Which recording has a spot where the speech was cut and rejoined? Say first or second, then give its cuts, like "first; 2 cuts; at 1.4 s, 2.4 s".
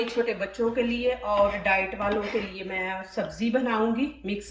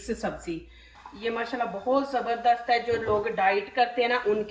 second; 1 cut; at 1.0 s